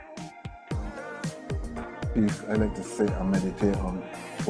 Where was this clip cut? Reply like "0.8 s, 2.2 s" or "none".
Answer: none